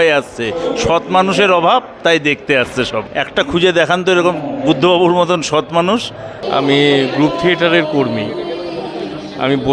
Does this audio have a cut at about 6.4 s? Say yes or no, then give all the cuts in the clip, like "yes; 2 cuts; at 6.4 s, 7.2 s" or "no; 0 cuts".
yes; 2 cuts; at 3.1 s, 6.4 s